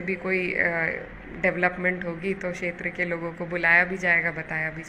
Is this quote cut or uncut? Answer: uncut